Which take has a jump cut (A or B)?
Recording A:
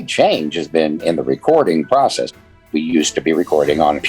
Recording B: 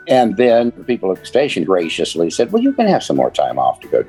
A